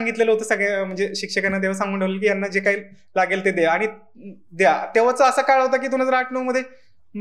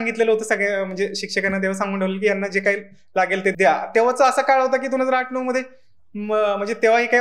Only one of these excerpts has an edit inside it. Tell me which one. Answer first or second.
second